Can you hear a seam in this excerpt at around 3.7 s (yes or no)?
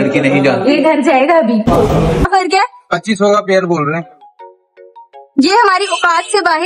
no